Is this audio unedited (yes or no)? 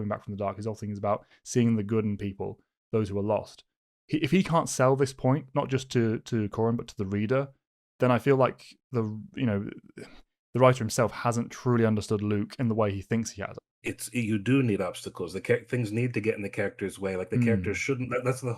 no